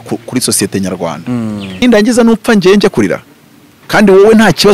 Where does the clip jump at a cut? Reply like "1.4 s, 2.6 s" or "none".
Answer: 1.8 s